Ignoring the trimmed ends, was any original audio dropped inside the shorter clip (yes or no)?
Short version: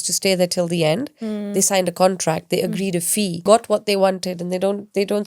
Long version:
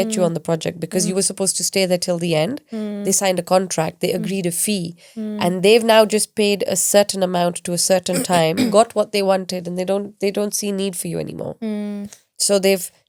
yes